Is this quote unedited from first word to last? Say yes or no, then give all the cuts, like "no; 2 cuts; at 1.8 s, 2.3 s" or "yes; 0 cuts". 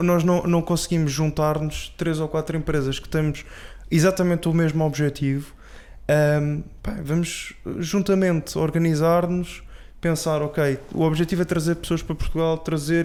yes; 0 cuts